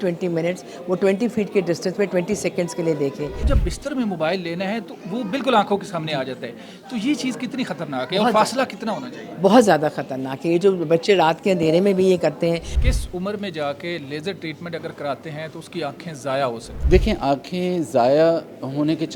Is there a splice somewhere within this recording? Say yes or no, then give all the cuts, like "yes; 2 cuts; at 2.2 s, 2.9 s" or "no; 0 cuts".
yes; 3 cuts; at 3.4 s, 12.7 s, 16.7 s